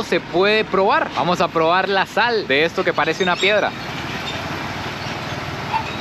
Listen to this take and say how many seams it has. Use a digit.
0